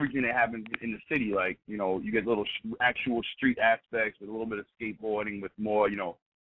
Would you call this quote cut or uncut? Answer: cut